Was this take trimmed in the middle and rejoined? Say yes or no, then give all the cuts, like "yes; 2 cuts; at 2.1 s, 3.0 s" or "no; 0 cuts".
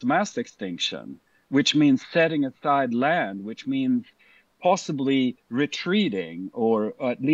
no; 0 cuts